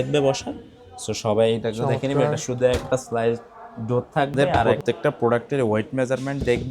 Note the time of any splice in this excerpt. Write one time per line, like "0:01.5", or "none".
0:04.7